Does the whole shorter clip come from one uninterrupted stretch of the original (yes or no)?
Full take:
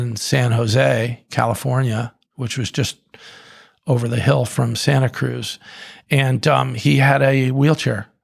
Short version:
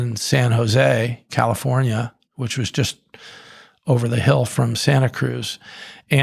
yes